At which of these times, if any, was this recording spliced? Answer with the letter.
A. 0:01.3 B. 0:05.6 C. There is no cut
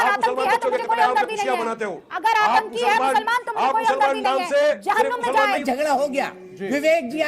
B